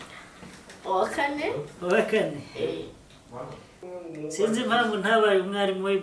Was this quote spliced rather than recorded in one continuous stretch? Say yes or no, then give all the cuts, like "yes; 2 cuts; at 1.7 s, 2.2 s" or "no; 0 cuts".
yes; 1 cut; at 3.8 s